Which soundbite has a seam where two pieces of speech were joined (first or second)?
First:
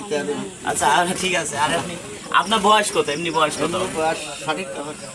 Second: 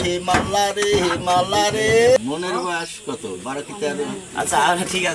second